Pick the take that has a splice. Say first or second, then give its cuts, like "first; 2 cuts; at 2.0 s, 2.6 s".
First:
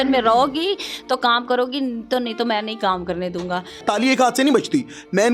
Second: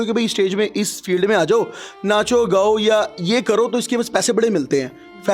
first; 1 cut; at 3.8 s